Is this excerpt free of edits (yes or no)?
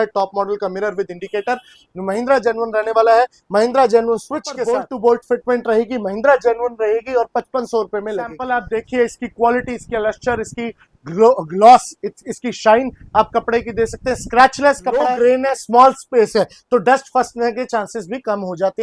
no